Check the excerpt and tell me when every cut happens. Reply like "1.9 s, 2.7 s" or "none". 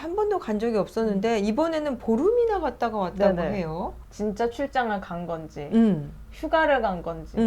4.0 s